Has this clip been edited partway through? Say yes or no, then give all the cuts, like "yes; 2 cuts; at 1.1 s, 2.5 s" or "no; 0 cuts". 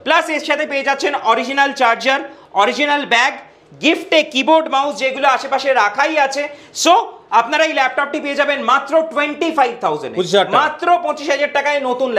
no; 0 cuts